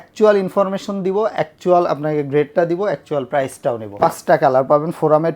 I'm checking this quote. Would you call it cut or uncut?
cut